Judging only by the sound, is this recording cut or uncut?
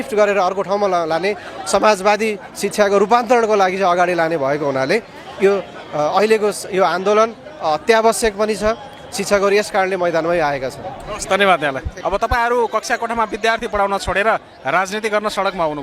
uncut